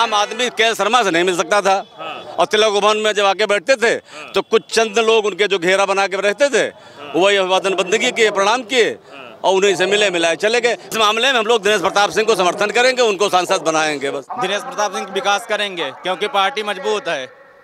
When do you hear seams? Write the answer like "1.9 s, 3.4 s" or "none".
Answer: 10.9 s, 14.2 s